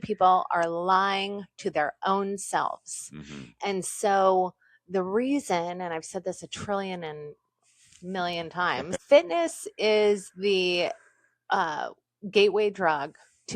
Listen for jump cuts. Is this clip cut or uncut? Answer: cut